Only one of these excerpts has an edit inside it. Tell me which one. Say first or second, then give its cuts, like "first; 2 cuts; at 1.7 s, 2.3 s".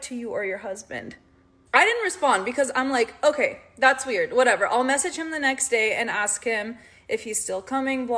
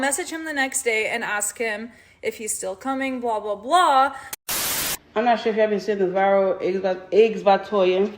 second; 1 cut; at 4.4 s